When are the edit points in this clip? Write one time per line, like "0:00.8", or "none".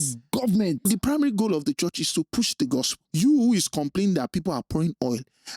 0:00.7
0:03.0